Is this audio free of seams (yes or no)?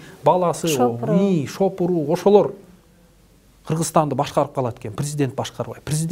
yes